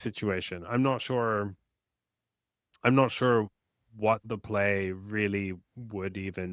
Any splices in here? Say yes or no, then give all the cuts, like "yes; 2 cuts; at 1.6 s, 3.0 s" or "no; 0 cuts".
no; 0 cuts